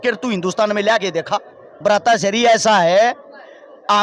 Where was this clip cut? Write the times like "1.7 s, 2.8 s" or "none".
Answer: 1.7 s